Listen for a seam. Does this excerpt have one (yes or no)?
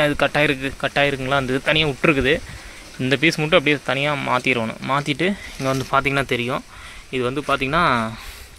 no